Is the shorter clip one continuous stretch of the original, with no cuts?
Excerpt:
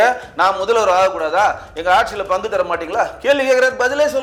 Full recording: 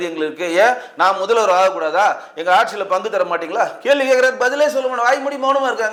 yes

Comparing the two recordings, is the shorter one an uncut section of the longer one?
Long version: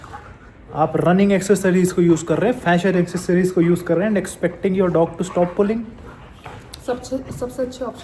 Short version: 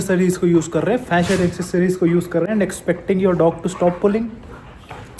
yes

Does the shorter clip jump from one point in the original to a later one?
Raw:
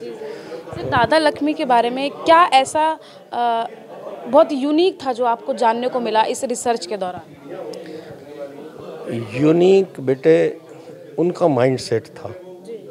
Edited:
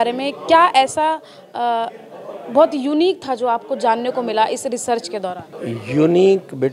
yes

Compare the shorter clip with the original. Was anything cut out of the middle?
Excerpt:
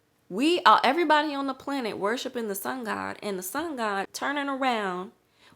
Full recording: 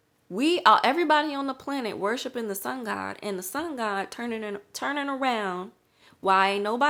yes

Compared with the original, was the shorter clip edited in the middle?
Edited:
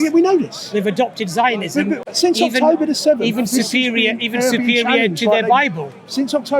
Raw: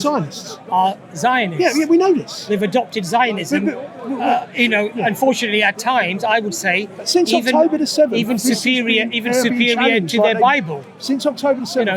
yes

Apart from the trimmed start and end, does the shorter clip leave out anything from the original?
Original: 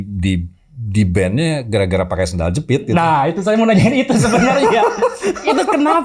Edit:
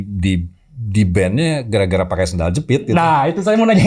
no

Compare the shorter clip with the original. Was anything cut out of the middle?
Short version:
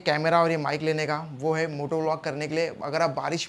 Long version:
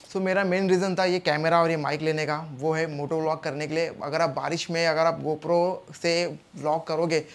no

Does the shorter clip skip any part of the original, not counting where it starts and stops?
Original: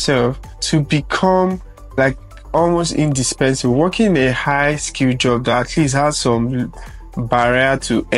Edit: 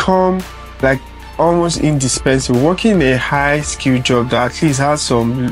no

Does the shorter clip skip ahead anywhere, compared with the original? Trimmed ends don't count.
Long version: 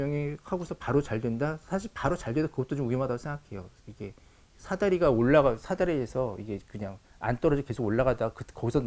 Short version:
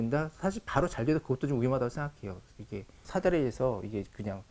yes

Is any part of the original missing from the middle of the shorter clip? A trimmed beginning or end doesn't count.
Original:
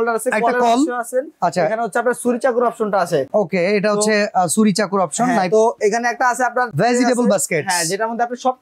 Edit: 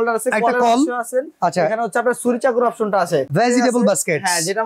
yes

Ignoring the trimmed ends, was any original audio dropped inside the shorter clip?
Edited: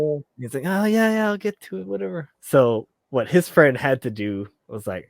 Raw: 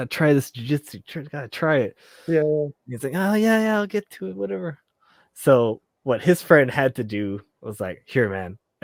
yes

